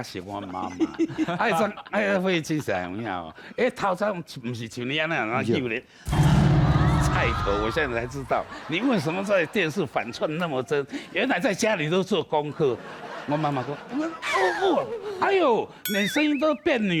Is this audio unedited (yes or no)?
yes